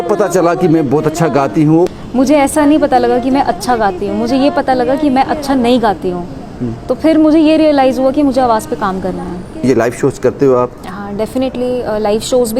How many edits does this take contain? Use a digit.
2